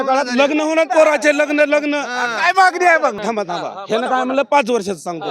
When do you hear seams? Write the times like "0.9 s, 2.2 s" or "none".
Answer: 3.2 s